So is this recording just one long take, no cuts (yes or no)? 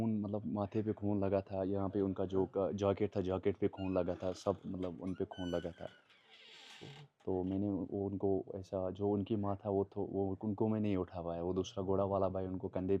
yes